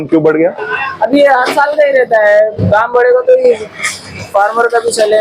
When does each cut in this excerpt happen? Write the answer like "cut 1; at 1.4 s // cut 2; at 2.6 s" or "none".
none